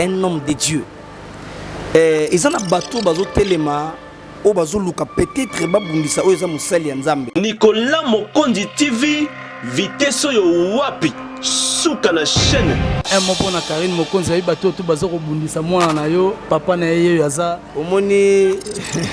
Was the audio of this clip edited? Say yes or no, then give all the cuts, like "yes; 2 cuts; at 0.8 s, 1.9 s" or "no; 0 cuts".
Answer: yes; 2 cuts; at 7.3 s, 13.0 s